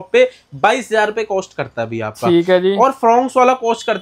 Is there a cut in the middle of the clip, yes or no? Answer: no